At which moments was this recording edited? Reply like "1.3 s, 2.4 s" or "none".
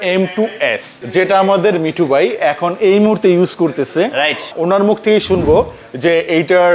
0.9 s, 4.5 s